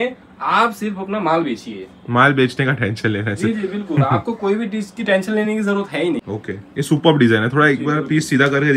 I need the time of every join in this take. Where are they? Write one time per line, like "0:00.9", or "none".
0:06.3